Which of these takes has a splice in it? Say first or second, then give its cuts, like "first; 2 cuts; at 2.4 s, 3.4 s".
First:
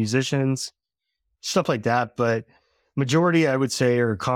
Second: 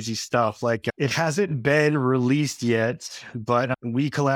second; 1 cut; at 0.9 s